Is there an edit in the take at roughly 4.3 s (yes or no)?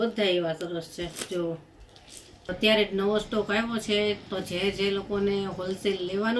no